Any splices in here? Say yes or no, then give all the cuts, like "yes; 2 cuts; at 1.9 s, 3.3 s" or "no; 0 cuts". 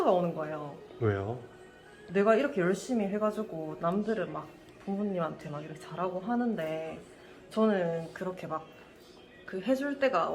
no; 0 cuts